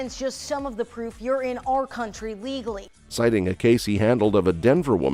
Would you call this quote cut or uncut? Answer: uncut